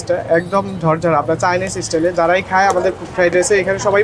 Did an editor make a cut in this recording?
no; 0 cuts

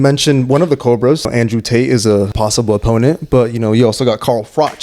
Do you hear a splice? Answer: yes; 2 cuts; at 1.3 s, 2.3 s

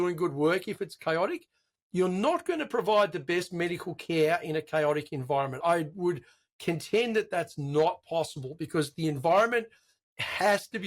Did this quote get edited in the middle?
no; 0 cuts

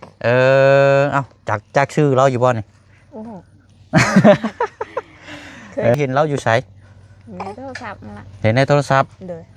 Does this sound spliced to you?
yes; 1 cut; at 5.9 s

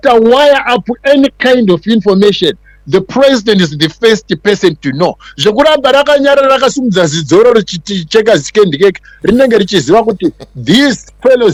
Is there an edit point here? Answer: no; 0 cuts

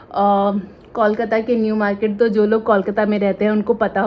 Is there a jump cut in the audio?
no; 0 cuts

